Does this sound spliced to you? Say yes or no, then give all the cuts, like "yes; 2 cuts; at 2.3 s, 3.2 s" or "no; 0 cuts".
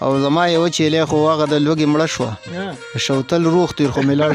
yes; 1 cut; at 1.0 s